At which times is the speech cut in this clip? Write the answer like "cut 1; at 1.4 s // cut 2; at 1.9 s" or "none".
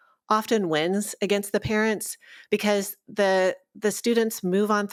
none